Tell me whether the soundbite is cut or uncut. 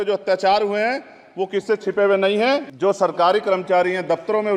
cut